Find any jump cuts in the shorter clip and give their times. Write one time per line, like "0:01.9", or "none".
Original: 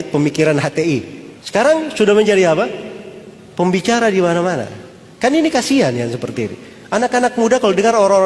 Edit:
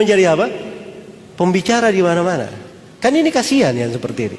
none